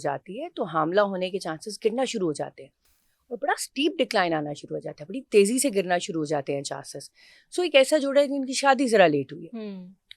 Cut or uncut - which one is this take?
uncut